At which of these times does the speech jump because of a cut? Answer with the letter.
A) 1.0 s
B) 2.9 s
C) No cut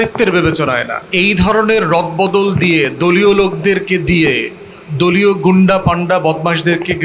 A